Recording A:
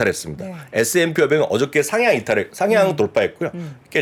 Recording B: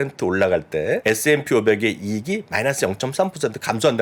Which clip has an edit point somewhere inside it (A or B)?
B